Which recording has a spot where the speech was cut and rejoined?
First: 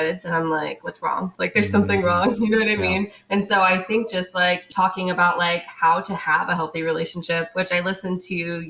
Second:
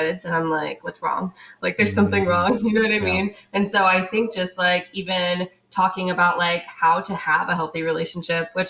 first; 2 cuts; at 1.3 s, 4.7 s

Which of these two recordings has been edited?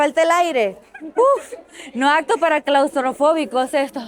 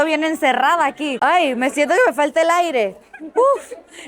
second; 1 cut; at 1.1 s

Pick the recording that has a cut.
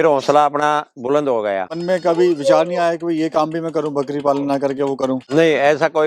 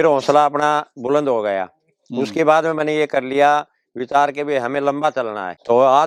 first; 2 cuts; at 1.7 s, 5.2 s

